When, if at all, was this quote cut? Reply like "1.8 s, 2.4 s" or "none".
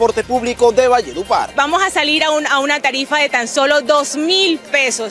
1.5 s